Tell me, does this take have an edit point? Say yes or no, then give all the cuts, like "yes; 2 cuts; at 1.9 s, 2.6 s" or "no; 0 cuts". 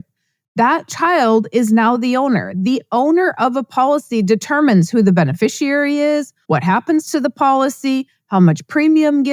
yes; 1 cut; at 6.3 s